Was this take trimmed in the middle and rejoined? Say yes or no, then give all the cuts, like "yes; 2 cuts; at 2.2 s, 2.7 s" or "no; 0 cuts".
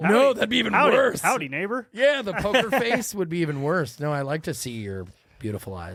no; 0 cuts